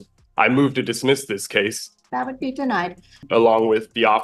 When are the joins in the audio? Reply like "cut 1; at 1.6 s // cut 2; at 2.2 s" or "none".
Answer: cut 1; at 1.8 s // cut 2; at 3.2 s

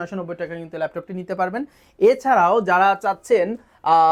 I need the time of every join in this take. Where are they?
none

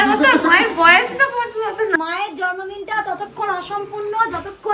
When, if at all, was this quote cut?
cut 1; at 2.0 s

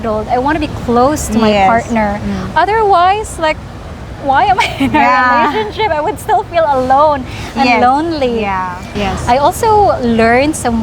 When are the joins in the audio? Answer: cut 1; at 8.9 s

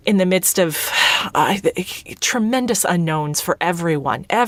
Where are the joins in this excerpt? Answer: none

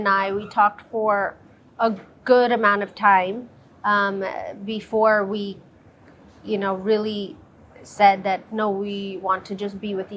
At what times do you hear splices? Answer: none

